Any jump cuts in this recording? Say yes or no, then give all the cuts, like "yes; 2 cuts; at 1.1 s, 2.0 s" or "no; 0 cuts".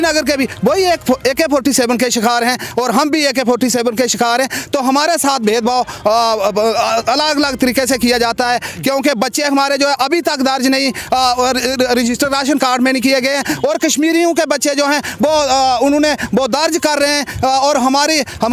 no; 0 cuts